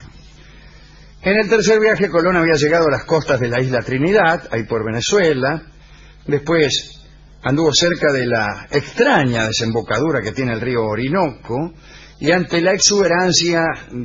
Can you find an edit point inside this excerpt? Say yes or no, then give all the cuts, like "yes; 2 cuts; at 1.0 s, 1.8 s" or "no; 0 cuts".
no; 0 cuts